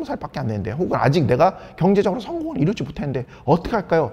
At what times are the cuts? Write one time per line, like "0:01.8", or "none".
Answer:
none